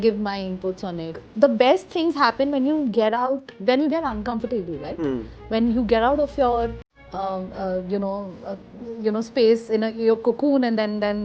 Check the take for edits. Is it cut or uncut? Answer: cut